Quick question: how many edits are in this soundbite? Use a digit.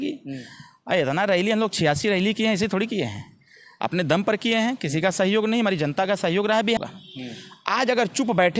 1